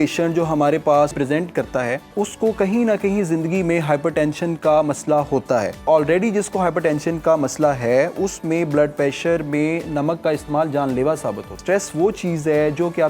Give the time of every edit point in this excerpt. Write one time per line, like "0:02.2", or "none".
0:01.1
0:02.1
0:05.8
0:11.6